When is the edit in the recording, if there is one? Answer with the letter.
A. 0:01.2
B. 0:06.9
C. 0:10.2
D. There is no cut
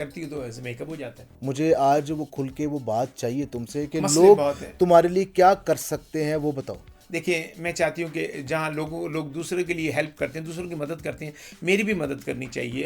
A